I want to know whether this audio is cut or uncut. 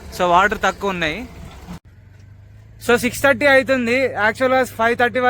cut